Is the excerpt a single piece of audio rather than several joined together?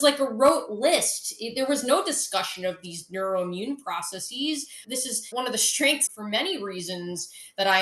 no; 1 cut; at 4.8 s

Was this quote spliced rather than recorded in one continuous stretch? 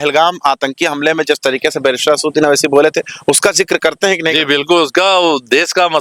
no; 0 cuts

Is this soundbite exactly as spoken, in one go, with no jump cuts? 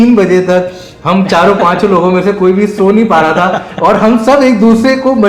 yes; 0 cuts

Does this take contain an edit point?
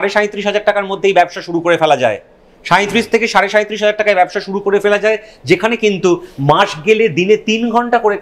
no; 0 cuts

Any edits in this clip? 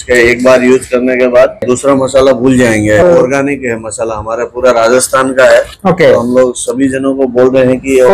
yes; 2 cuts; at 1.6 s, 3.0 s

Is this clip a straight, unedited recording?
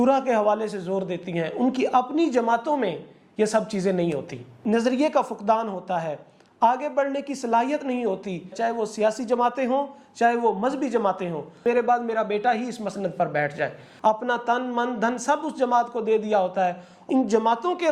no; 5 cuts; at 4.5 s, 8.5 s, 11.6 s, 13.9 s, 16.9 s

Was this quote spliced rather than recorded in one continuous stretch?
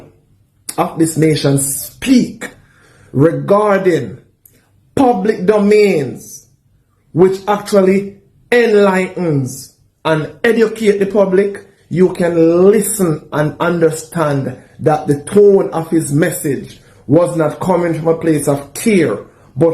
no; 0 cuts

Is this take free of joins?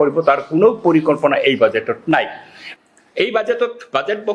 no; 1 cut; at 2.6 s

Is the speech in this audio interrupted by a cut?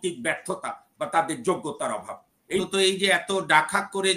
no; 0 cuts

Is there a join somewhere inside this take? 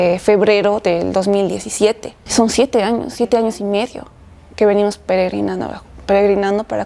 yes; 1 cut; at 2.1 s

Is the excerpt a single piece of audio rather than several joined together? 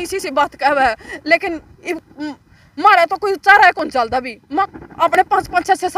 no; 1 cut; at 4.7 s

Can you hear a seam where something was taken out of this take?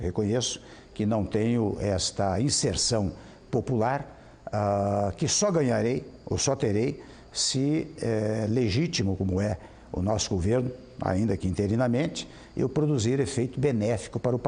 no; 0 cuts

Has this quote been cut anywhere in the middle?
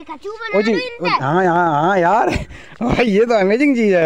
no; 0 cuts

